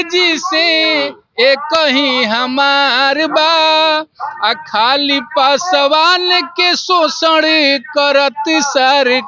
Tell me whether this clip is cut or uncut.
uncut